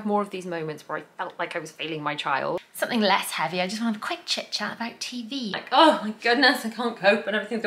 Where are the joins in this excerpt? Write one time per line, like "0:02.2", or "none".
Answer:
0:02.7
0:05.6